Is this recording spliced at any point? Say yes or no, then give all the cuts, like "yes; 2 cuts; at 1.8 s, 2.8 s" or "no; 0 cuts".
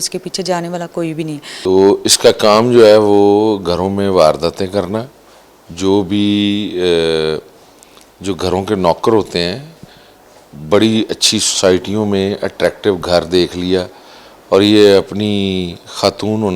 yes; 1 cut; at 1.5 s